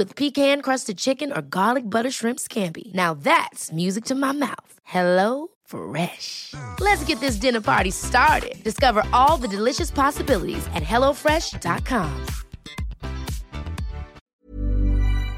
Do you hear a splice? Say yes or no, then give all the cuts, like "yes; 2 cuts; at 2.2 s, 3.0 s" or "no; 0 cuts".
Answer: yes; 1 cut; at 14.3 s